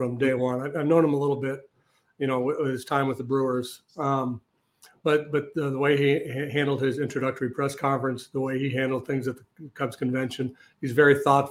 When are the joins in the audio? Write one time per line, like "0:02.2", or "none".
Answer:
none